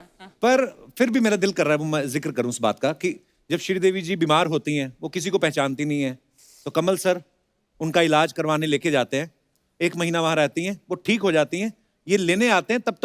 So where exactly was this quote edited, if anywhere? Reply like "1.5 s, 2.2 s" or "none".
none